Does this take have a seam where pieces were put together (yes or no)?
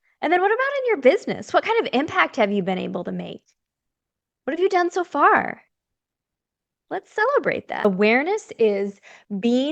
yes